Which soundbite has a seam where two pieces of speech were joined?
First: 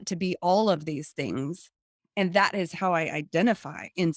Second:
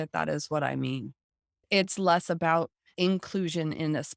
second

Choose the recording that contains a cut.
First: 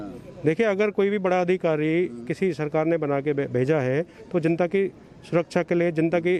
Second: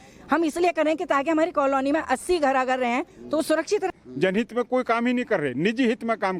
second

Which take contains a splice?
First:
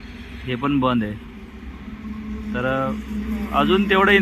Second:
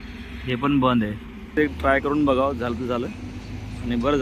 second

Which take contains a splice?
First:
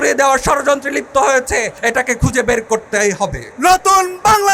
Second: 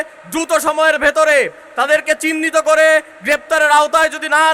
first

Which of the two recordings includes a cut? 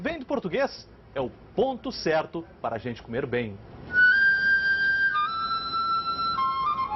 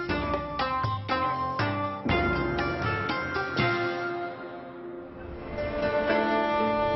first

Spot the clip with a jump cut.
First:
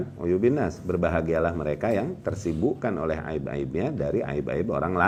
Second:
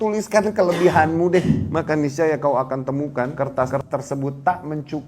second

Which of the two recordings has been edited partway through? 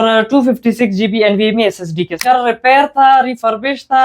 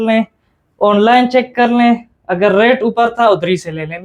first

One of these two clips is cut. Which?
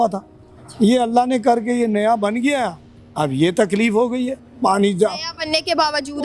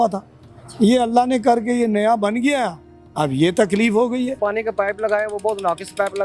second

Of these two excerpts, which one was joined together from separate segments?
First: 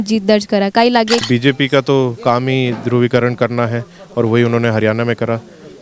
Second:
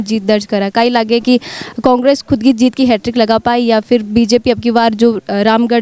first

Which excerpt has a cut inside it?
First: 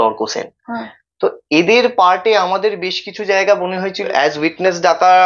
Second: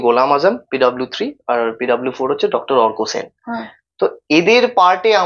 first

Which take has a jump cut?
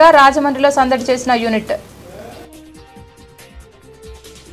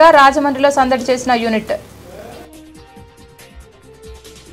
second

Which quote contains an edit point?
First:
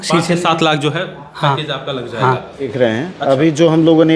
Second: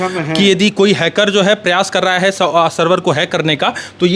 first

